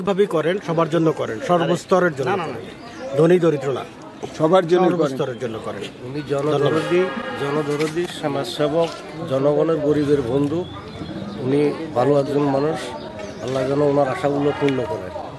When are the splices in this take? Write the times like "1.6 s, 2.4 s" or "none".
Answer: none